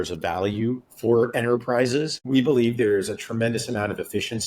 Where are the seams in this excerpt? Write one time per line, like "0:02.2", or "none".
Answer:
0:02.2